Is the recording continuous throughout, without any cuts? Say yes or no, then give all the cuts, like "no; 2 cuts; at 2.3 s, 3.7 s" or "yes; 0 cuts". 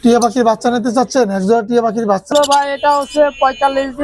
no; 1 cut; at 2.3 s